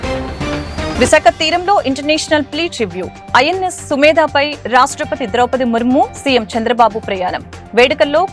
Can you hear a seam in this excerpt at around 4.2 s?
no; 1 cut; at 0.9 s

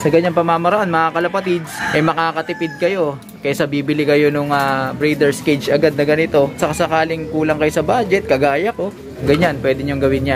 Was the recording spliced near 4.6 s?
no; 3 cuts; at 1.8 s, 6.6 s, 9.2 s

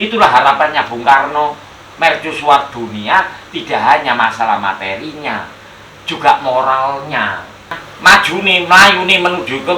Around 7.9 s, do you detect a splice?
yes; 1 cut; at 7.9 s

